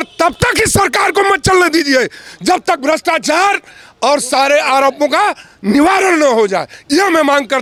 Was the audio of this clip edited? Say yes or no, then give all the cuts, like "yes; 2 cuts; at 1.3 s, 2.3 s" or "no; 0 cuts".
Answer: no; 0 cuts